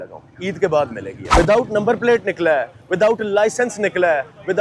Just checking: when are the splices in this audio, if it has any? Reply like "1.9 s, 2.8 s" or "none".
1.2 s